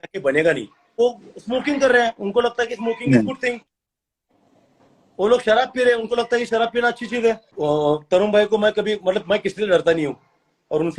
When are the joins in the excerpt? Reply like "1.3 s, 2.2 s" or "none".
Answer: 1.0 s, 7.5 s